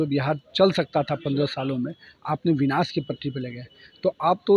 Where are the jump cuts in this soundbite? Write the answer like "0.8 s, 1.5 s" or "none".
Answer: none